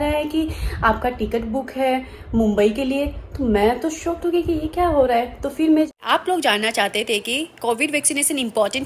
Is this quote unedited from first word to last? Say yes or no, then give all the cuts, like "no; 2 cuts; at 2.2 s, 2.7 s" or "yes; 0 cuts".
no; 1 cut; at 5.9 s